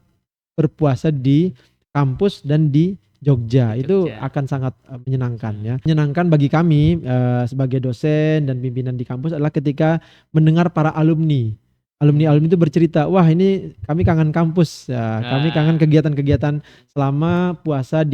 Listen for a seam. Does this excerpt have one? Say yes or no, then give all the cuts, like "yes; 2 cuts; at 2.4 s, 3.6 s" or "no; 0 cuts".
no; 0 cuts